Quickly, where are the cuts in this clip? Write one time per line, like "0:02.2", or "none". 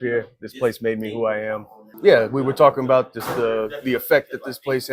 0:01.8